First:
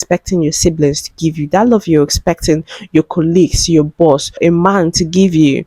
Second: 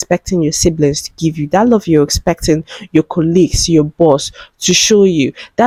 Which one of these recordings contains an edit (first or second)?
first